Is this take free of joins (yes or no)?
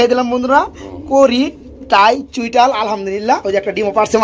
yes